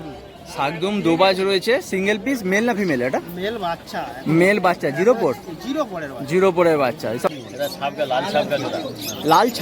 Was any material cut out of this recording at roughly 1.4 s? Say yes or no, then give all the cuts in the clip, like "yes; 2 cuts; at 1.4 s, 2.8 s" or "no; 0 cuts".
no; 1 cut; at 7.3 s